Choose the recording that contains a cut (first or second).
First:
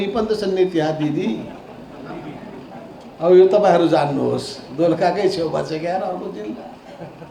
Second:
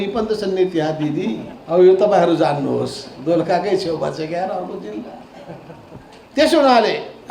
second